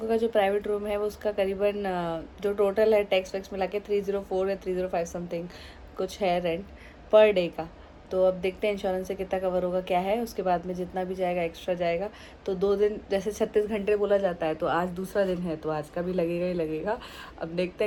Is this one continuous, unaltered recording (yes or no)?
yes